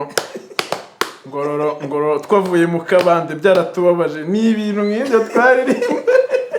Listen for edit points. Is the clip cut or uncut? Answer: uncut